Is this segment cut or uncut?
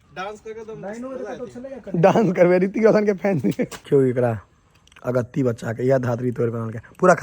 cut